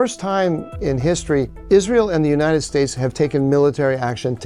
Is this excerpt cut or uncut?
cut